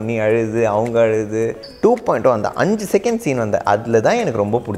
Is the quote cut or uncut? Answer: cut